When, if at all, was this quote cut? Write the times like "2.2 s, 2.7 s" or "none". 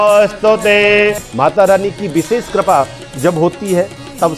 1.3 s